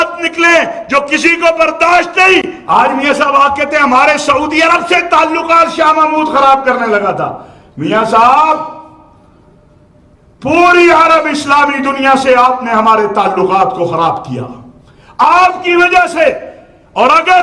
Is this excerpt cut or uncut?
cut